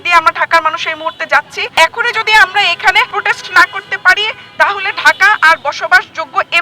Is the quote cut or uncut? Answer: cut